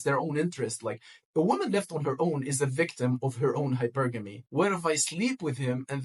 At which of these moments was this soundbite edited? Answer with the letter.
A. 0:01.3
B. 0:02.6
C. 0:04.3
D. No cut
C